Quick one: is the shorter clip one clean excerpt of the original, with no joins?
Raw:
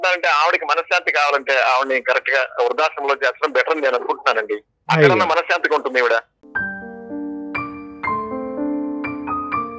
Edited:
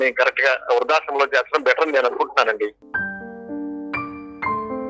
no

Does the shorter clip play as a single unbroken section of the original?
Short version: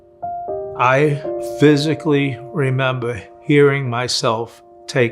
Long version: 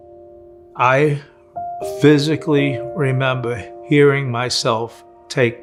no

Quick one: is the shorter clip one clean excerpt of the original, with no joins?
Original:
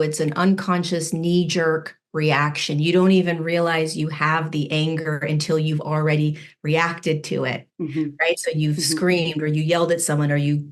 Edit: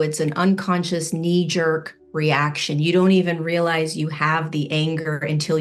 yes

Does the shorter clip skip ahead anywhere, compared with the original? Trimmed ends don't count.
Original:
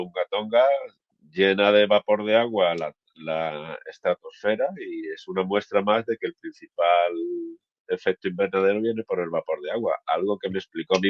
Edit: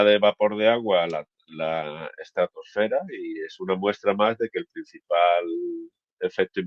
no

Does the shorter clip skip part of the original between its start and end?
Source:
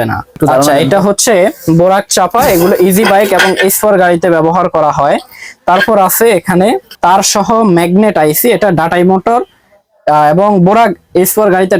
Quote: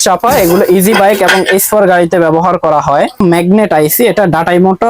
yes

